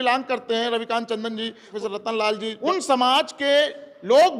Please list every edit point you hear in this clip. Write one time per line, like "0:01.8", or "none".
0:01.7
0:02.6